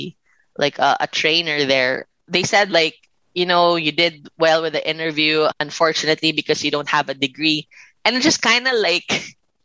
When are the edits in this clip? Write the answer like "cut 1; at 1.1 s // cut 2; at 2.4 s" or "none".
cut 1; at 2.1 s // cut 2; at 5.6 s